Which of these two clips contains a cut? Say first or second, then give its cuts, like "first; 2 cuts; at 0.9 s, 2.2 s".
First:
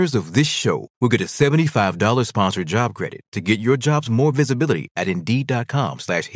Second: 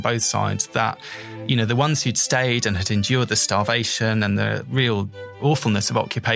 second; 1 cut; at 5.0 s